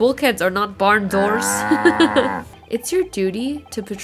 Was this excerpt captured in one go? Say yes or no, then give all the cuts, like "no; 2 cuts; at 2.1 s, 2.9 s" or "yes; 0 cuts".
no; 1 cut; at 2.5 s